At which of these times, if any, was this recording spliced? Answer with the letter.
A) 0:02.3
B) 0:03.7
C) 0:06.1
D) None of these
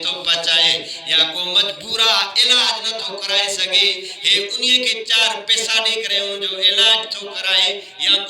D